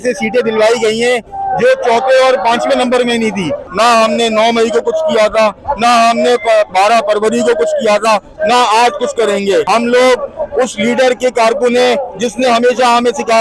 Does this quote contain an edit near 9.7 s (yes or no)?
yes